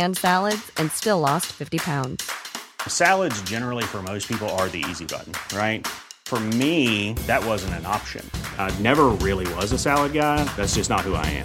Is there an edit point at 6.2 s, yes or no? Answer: no